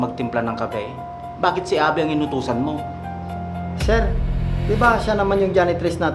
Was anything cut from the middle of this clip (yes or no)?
no